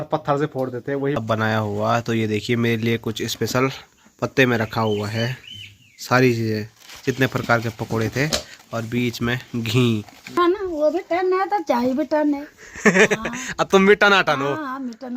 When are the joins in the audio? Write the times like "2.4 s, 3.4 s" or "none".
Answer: 1.2 s, 10.2 s